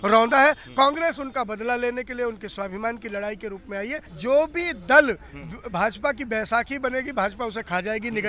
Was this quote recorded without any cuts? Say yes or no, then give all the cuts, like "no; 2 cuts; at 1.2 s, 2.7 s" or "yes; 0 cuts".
no; 1 cut; at 4.0 s